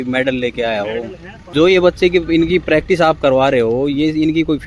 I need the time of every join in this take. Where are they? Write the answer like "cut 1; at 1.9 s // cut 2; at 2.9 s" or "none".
cut 1; at 1.5 s